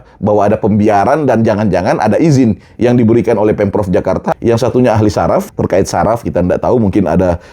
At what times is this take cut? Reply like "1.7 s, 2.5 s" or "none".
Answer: 4.3 s, 5.5 s